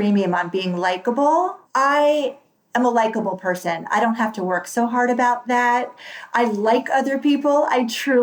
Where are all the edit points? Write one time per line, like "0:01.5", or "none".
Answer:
0:01.6